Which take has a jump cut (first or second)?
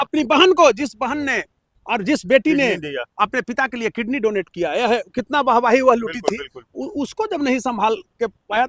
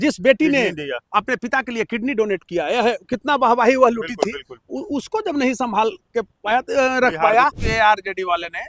second